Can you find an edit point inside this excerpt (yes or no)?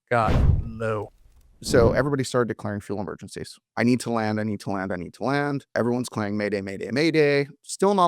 yes